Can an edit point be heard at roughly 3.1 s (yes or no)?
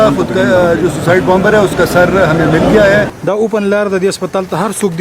yes